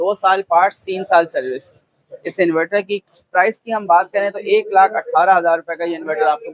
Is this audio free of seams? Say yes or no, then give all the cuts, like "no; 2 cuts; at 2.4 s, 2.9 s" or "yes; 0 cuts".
yes; 0 cuts